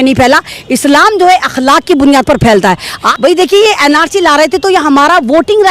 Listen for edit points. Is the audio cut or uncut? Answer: cut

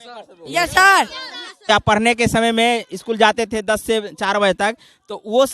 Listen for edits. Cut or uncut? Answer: cut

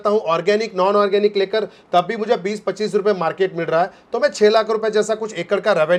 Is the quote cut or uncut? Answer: uncut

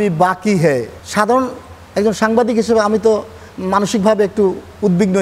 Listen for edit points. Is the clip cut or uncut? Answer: cut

